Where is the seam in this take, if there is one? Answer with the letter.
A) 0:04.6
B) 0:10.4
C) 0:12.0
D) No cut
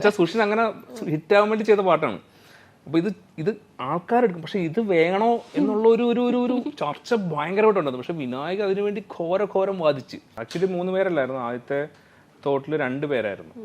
B